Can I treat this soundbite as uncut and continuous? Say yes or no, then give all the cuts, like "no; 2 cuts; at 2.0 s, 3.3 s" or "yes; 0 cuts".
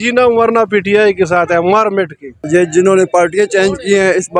no; 1 cut; at 2.4 s